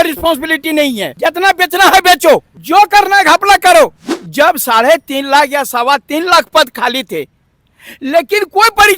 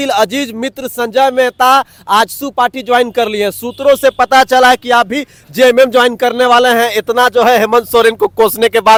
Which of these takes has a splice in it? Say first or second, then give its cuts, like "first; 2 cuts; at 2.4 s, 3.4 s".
first; 3 cuts; at 1.1 s, 2.5 s, 4.0 s